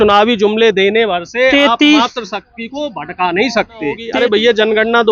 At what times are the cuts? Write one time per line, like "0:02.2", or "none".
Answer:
0:04.1